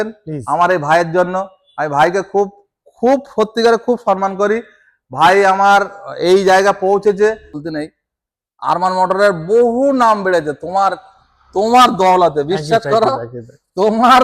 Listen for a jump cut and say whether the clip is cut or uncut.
cut